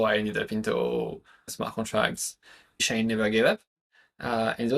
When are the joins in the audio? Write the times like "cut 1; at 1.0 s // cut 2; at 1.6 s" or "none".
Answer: cut 1; at 1.5 s // cut 2; at 2.9 s